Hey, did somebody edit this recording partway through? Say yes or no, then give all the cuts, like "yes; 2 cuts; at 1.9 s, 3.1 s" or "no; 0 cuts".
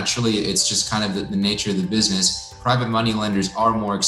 yes; 1 cut; at 2.6 s